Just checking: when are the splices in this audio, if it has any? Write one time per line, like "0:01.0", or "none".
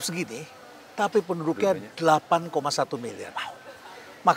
none